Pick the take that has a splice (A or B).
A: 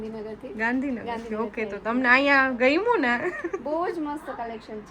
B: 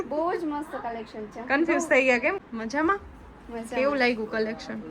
B